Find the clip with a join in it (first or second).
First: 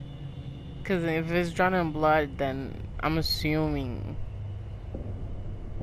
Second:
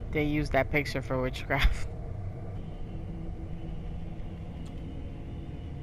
second